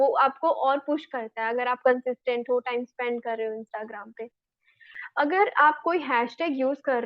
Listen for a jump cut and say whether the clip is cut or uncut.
cut